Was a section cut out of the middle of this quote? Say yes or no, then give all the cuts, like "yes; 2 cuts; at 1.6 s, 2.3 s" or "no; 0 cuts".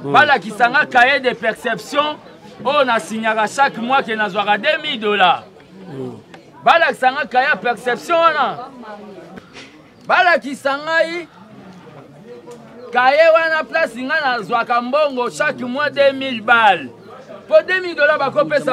yes; 1 cut; at 9.2 s